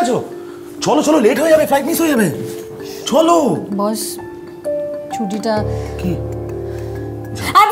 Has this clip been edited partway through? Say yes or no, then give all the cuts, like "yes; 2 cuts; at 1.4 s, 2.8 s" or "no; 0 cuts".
no; 0 cuts